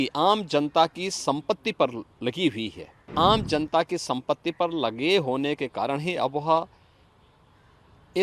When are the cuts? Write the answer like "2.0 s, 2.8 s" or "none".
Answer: 3.1 s